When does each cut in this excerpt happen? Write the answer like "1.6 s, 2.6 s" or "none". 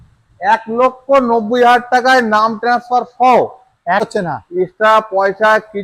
4.1 s